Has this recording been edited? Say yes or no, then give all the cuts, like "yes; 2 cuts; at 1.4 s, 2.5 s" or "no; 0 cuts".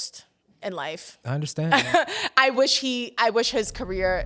no; 0 cuts